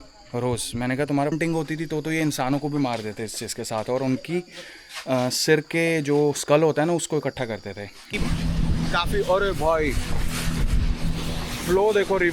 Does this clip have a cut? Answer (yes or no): yes